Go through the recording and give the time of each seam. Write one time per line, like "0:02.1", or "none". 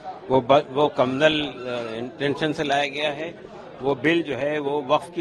none